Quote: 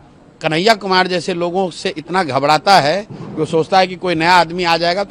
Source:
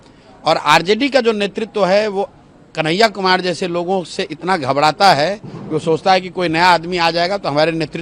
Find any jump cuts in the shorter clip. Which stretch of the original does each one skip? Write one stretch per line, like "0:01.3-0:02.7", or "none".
none